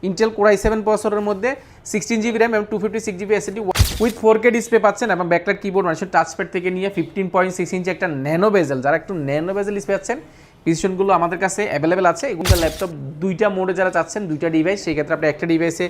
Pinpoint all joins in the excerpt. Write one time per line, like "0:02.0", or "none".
0:03.7
0:12.4